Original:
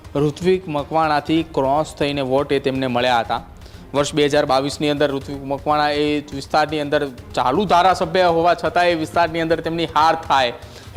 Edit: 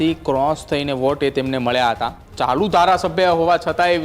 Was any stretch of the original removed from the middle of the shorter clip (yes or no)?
yes